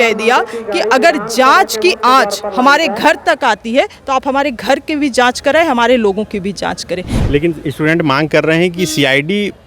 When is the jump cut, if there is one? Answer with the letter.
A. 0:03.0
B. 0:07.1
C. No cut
B